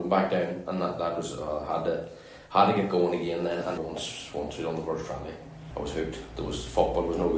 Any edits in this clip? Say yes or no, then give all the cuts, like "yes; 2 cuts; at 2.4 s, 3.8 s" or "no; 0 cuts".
yes; 2 cuts; at 3.8 s, 5.5 s